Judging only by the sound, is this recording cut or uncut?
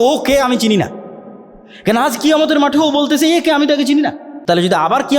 cut